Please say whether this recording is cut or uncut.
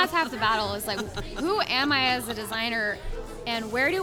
uncut